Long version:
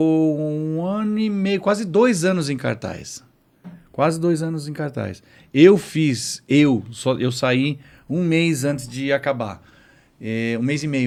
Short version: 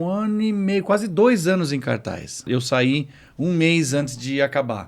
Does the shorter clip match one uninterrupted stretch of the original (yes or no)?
no